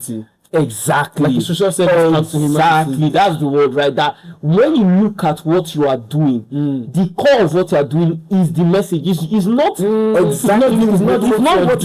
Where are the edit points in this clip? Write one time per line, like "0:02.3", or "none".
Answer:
none